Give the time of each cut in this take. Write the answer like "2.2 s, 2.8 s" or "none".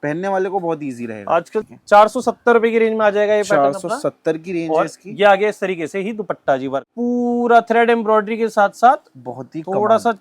1.7 s, 6.9 s